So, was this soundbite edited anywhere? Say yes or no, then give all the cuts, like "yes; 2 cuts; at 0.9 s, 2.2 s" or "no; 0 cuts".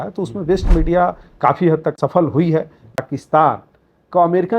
yes; 2 cuts; at 2.0 s, 3.0 s